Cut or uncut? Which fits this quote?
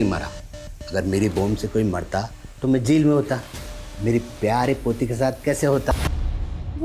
cut